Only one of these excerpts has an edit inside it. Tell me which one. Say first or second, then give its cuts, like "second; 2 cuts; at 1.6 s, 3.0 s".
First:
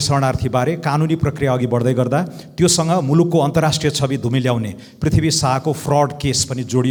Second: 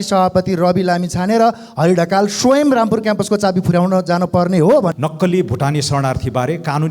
second; 1 cut; at 4.9 s